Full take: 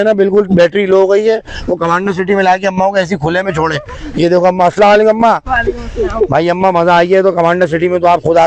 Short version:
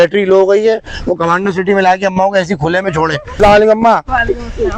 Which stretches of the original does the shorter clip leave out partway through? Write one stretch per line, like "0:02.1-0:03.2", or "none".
0:04.0-0:04.7